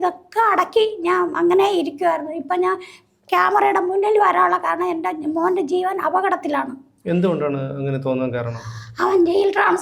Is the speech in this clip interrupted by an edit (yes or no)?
no